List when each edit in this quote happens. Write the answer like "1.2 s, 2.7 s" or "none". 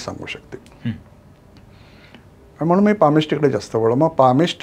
none